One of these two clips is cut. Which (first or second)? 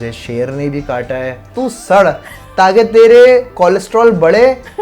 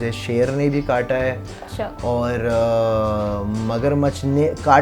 first